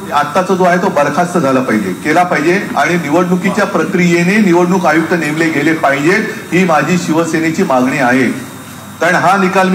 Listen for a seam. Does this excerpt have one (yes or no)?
no